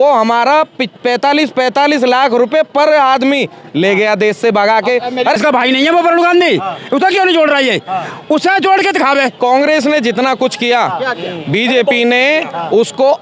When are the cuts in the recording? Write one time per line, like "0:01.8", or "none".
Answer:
0:05.4
0:09.3